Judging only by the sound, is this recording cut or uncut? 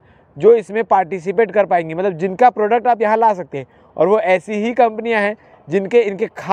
uncut